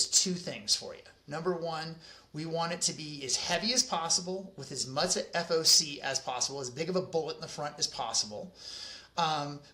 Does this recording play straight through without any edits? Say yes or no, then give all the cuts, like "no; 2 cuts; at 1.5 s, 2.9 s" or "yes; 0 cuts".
yes; 0 cuts